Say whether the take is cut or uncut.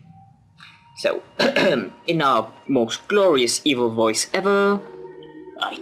uncut